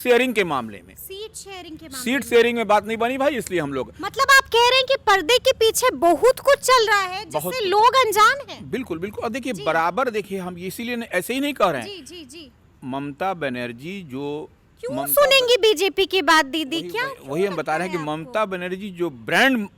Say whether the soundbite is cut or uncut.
uncut